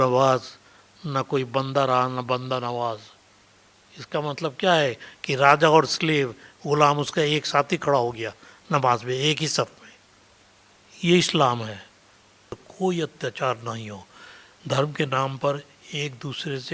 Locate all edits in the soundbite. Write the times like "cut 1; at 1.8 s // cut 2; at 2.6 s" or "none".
cut 1; at 12.6 s